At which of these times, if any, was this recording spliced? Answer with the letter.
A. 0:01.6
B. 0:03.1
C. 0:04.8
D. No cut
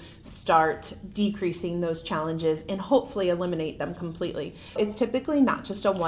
C